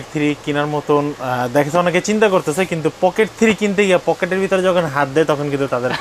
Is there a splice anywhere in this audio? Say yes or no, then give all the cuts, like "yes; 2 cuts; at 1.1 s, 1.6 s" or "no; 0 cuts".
no; 0 cuts